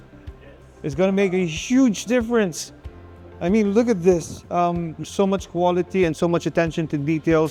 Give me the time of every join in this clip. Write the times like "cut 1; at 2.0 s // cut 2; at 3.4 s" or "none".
none